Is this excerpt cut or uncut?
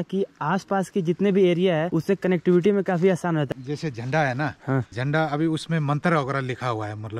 cut